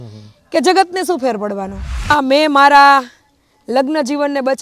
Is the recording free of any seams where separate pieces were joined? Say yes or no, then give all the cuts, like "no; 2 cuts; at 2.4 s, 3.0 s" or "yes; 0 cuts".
no; 1 cut; at 2.1 s